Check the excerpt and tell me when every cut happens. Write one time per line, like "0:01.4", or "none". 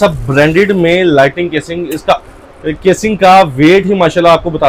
none